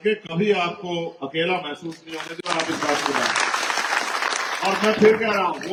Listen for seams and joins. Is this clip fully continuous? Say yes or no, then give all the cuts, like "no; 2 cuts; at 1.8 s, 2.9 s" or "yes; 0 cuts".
yes; 0 cuts